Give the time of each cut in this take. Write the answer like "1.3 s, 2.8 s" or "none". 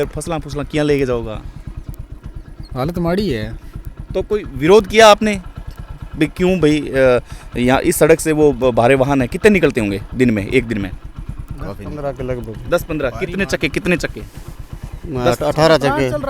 none